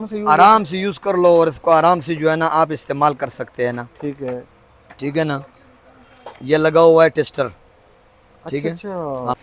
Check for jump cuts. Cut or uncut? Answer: uncut